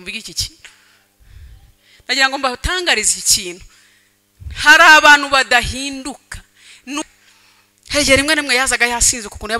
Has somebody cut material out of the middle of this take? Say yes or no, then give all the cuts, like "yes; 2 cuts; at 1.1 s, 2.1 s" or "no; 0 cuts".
yes; 1 cut; at 7.0 s